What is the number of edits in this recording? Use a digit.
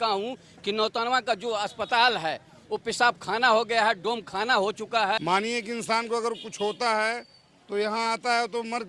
1